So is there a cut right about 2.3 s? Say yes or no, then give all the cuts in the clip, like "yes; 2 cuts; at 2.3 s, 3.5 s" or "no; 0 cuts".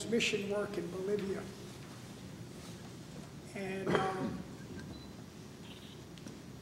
yes; 1 cut; at 2.3 s